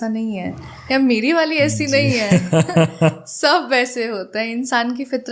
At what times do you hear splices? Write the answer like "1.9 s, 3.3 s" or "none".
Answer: none